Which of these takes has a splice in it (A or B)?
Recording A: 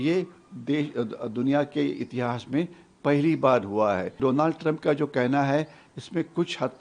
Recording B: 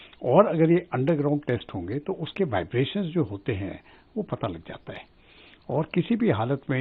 A